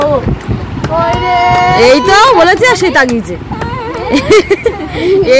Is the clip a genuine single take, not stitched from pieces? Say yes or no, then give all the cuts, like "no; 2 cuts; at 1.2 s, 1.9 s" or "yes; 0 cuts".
yes; 0 cuts